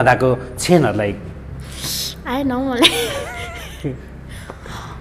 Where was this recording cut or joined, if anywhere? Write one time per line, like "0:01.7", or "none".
none